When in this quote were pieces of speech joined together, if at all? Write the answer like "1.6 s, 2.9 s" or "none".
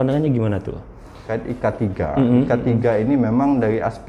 1.3 s